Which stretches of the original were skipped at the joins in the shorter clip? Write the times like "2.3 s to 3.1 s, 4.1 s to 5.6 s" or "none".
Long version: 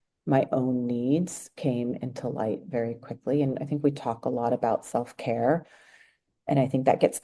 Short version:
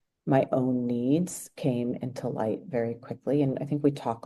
none

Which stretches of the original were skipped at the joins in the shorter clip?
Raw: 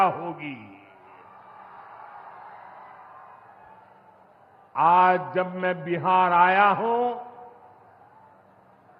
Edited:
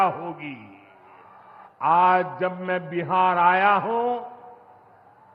1.6 s to 4.6 s

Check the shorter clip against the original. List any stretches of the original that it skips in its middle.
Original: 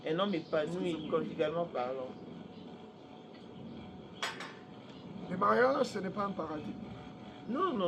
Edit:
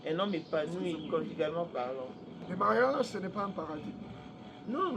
2.3 s to 5.1 s

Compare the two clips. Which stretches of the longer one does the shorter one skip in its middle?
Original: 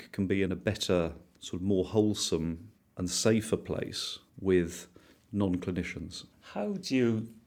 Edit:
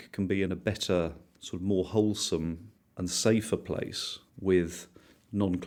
none

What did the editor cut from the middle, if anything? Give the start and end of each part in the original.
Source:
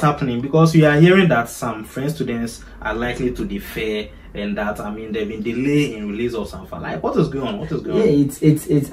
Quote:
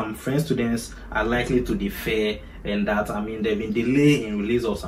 none

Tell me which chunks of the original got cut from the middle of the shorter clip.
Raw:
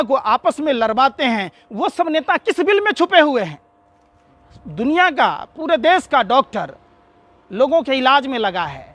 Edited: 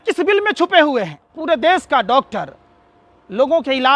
3.7 s to 5.5 s

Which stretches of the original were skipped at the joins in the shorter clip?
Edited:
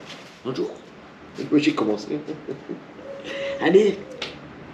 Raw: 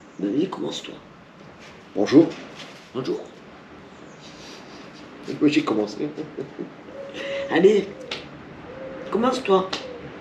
3.7 s to 5.1 s

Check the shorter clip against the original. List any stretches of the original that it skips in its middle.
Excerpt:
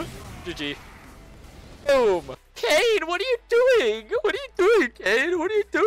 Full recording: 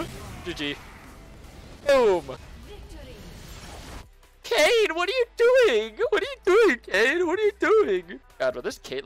2.4 s to 4.3 s

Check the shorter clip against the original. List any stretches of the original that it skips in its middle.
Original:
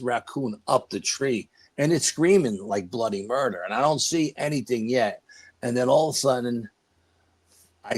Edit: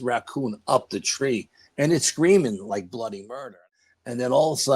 3.6 s to 5.2 s

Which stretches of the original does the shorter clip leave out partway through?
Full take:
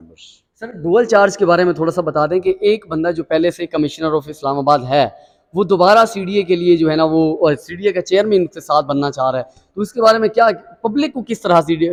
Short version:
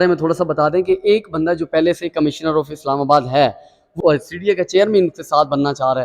5.5 s to 7.3 s

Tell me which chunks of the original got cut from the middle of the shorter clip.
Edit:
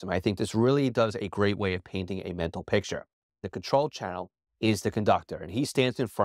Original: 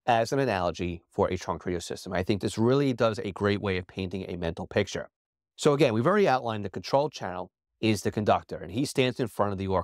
5.4 s to 6.6 s

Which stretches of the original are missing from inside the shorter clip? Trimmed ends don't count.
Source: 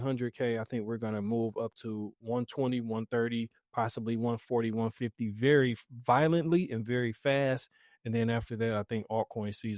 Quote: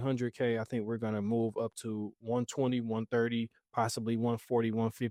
none

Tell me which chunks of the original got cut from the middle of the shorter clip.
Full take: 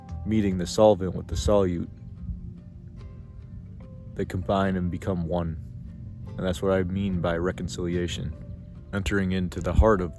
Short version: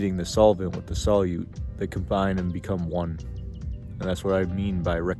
2.0 s to 4.0 s

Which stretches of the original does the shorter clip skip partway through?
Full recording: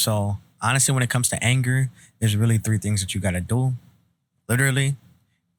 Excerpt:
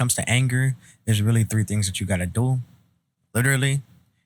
none

